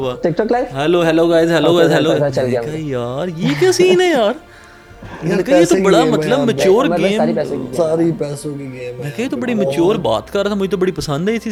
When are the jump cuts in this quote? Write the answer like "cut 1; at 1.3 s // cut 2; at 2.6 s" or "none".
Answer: none